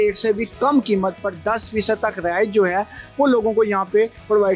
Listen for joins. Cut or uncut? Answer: uncut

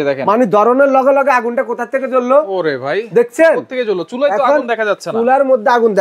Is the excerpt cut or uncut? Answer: uncut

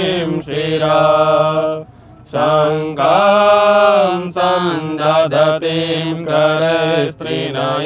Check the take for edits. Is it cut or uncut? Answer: uncut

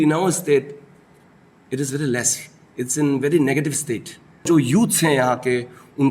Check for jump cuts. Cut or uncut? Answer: cut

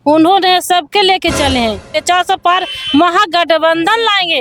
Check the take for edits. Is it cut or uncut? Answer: cut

